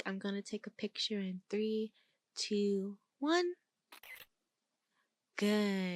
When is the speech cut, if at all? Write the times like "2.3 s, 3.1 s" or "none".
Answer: none